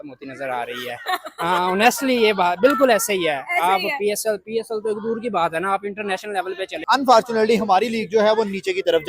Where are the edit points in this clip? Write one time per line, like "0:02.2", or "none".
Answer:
0:06.8